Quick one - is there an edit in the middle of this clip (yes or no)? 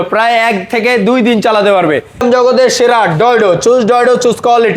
yes